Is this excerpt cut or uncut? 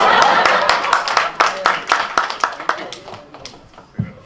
uncut